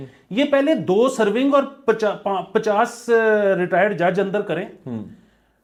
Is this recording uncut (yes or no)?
yes